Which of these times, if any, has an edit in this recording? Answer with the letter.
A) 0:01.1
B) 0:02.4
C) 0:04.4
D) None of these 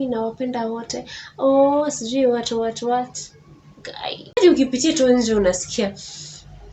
C